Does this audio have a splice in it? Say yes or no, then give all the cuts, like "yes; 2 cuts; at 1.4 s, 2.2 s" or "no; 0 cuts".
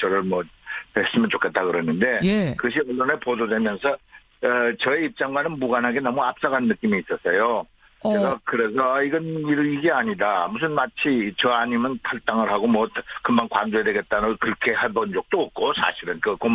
no; 0 cuts